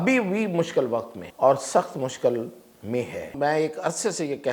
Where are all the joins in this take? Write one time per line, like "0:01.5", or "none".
0:01.2
0:03.3